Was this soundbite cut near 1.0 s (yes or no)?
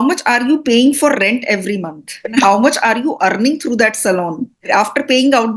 no